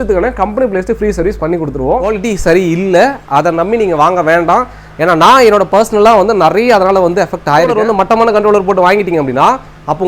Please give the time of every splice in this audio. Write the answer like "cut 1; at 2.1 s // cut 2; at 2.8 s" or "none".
cut 1; at 2.1 s // cut 2; at 7.7 s

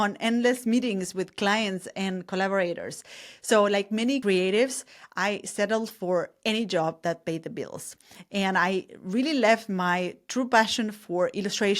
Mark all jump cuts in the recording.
cut 1; at 4.2 s

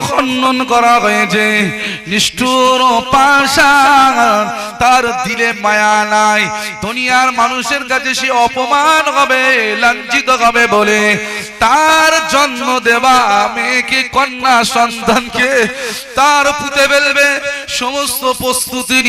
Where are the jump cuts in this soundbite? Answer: none

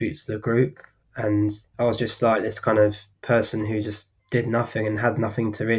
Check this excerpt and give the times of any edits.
cut 1; at 1.6 s // cut 2; at 3.1 s // cut 3; at 4.1 s

